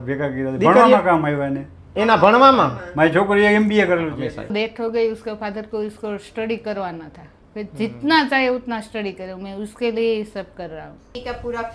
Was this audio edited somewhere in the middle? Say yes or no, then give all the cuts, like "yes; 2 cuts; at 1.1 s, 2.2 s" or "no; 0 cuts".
yes; 1 cut; at 4.1 s